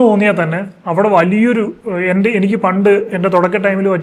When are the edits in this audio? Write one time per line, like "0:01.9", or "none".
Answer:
none